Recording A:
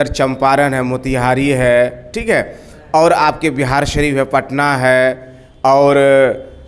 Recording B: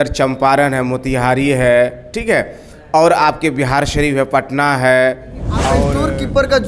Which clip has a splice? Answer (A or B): B